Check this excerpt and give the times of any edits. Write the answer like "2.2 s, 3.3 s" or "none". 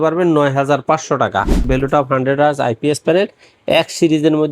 1.6 s